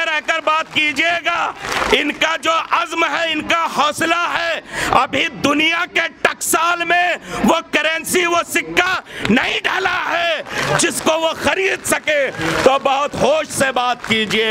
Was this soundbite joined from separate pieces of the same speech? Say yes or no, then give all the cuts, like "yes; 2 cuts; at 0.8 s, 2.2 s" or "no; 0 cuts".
no; 0 cuts